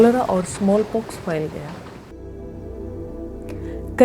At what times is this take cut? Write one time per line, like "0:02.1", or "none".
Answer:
0:02.1